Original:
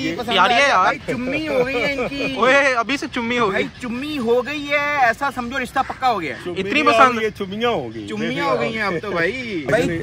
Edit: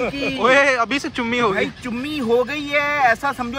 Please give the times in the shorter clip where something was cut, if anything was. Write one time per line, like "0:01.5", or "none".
none